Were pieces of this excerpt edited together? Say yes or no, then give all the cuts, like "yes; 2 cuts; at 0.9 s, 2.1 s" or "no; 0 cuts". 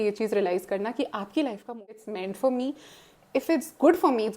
yes; 1 cut; at 1.9 s